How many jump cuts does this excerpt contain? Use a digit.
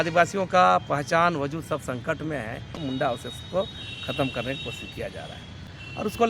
1